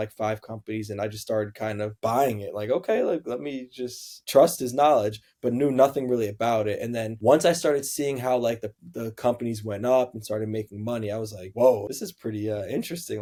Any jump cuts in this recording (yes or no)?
no